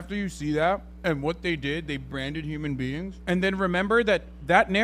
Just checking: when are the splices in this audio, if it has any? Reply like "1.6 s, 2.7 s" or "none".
0.9 s, 3.1 s